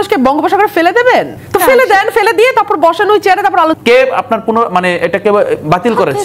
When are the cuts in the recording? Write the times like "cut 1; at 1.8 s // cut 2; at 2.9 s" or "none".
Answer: cut 1; at 1.4 s // cut 2; at 3.8 s